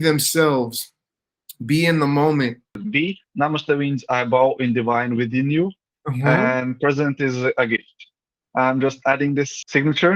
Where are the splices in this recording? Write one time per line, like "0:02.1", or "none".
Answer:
0:02.8
0:08.3